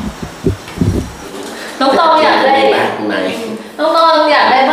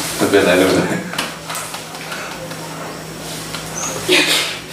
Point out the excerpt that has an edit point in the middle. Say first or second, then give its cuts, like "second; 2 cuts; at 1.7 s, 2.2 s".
first; 1 cut; at 1.3 s